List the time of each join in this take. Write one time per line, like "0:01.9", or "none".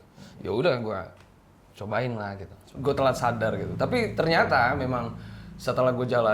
0:02.7

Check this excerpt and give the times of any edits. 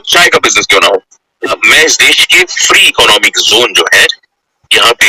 0:01.6

